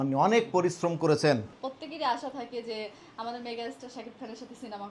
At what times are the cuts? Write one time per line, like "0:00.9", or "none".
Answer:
0:01.6